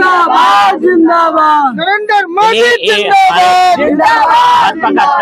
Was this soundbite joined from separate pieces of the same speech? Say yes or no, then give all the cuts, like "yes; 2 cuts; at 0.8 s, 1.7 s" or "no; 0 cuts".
no; 0 cuts